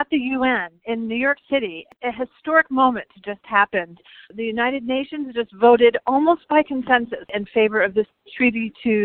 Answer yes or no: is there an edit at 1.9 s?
yes